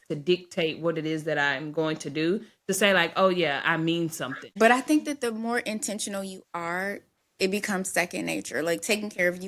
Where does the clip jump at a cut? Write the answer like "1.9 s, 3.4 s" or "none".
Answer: 4.5 s

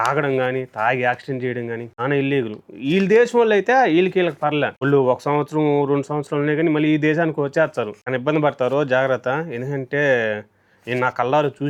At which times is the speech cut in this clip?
none

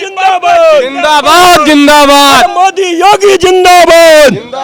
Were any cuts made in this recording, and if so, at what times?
none

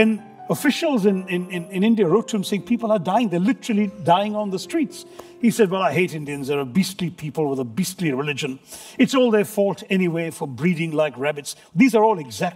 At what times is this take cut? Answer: none

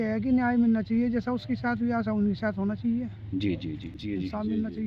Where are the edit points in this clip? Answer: 3.9 s

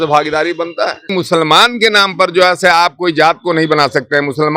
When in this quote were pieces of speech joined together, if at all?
1.1 s

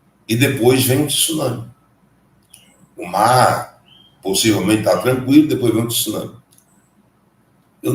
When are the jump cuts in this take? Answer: none

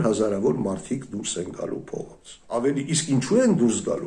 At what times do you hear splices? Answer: 2.6 s

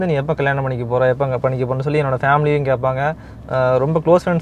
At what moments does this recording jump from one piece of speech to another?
none

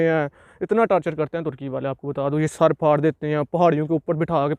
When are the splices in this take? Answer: none

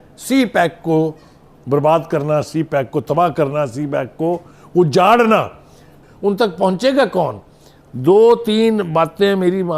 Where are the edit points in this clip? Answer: none

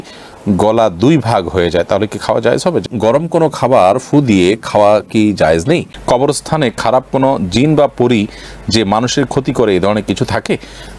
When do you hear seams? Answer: 2.8 s, 6.0 s

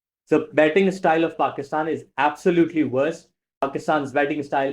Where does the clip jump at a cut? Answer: 3.7 s

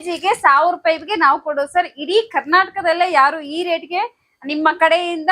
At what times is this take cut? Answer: none

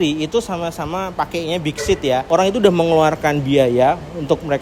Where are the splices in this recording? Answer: 2.2 s

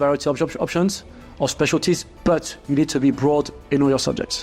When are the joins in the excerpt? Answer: none

